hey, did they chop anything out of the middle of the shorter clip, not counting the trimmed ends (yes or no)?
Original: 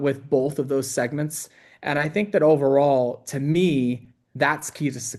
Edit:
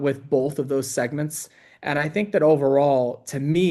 no